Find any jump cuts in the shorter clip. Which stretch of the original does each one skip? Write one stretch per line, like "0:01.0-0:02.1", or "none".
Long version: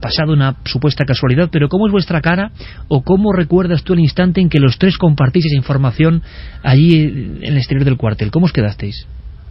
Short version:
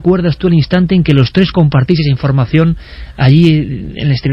none